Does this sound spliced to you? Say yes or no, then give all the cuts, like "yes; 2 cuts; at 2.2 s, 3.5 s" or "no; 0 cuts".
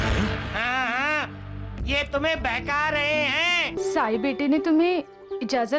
yes; 1 cut; at 3.8 s